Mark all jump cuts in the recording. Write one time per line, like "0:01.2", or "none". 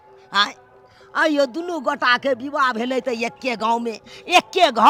none